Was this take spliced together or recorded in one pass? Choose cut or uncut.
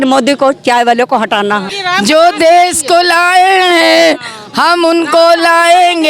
cut